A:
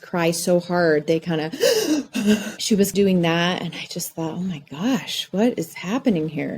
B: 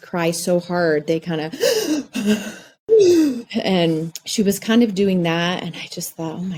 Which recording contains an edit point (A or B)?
A